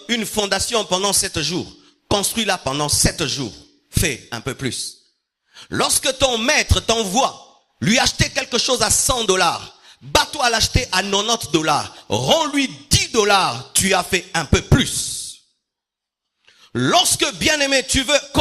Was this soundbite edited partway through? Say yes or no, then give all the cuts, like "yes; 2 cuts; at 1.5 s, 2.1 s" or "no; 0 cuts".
no; 0 cuts